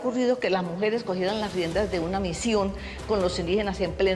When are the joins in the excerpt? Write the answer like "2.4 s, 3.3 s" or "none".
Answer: none